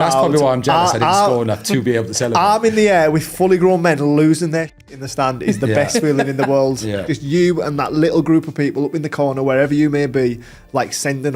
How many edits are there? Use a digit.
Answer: 1